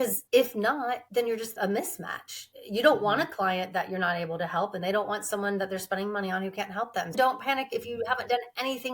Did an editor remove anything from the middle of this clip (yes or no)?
yes